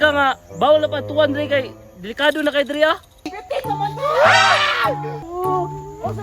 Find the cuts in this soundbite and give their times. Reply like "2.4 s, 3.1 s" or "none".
3.3 s, 5.2 s